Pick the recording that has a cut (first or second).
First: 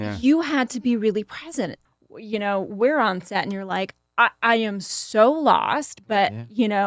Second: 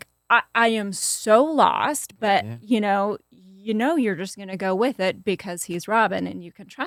first